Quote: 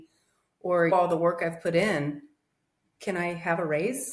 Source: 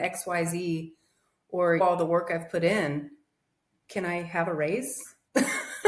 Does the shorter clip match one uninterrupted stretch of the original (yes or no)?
yes